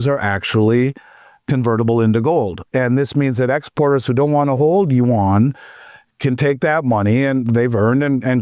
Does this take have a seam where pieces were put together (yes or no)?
yes